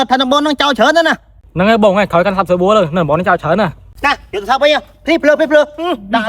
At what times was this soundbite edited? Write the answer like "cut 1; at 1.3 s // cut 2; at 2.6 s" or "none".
cut 1; at 3.8 s